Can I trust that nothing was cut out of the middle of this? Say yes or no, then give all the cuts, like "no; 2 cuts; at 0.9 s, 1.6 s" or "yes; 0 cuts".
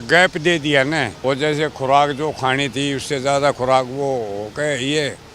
no; 1 cut; at 1.1 s